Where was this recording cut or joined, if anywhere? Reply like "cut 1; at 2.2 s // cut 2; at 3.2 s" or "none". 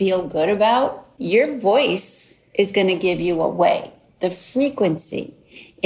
cut 1; at 1.1 s